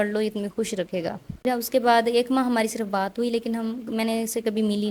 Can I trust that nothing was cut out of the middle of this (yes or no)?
no